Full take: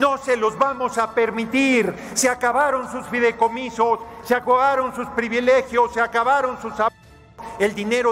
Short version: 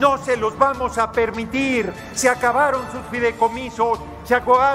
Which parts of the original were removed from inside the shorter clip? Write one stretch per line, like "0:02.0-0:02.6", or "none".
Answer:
none